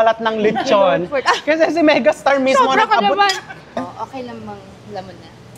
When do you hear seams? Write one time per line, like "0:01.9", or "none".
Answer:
0:03.8